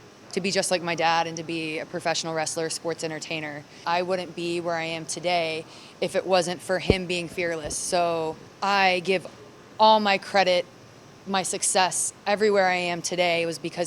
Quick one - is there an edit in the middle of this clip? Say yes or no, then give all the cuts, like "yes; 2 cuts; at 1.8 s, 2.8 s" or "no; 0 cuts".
yes; 1 cut; at 3.8 s